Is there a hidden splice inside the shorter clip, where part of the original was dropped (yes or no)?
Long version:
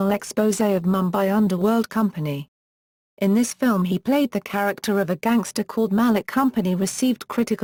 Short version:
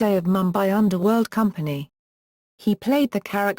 yes